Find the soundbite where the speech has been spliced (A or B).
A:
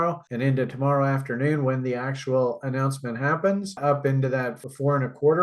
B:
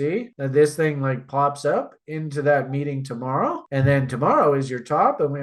A